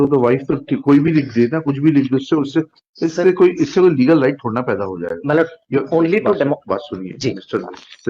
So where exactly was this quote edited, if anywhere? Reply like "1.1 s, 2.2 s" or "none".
none